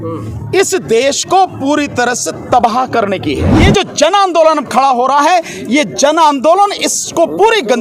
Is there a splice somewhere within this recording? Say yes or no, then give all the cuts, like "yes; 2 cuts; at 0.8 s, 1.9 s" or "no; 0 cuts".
yes; 1 cut; at 3.5 s